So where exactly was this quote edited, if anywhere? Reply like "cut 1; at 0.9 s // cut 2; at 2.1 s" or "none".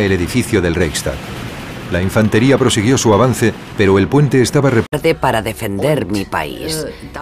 none